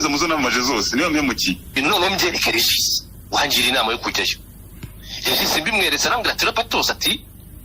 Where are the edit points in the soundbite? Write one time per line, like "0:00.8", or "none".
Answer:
0:01.8